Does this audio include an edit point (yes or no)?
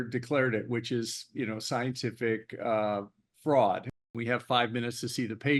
yes